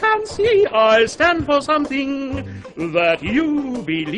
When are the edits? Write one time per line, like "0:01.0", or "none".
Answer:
none